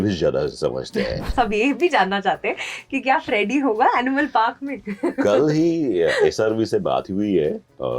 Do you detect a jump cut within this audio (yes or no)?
yes